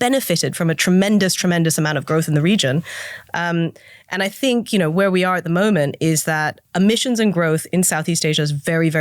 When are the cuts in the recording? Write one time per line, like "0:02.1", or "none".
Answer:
0:06.6